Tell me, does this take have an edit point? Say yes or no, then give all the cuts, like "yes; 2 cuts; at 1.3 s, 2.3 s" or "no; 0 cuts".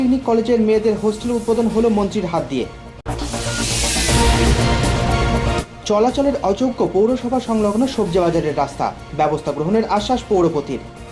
no; 0 cuts